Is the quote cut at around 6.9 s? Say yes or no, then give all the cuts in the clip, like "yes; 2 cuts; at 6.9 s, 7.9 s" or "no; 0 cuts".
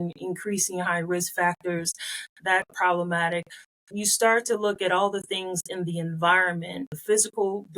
yes; 2 cuts; at 2.7 s, 6.9 s